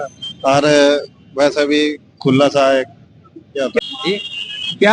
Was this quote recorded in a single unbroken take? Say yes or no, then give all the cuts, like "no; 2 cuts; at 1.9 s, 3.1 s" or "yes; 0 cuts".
no; 1 cut; at 3.8 s